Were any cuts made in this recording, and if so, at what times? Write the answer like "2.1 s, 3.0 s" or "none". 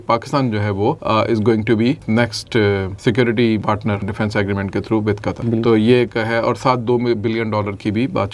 1.0 s, 2.0 s, 2.9 s, 3.8 s, 5.4 s